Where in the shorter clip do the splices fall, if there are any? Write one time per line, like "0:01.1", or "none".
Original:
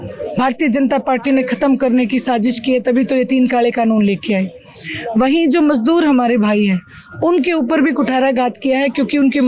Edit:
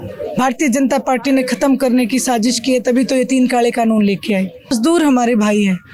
0:04.7